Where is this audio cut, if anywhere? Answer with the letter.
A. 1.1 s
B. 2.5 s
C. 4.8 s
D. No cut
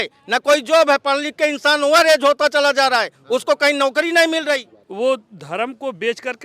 C